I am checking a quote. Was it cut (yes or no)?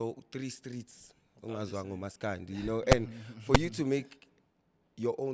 no